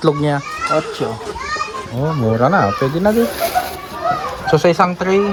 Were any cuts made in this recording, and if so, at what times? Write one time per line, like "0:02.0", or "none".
none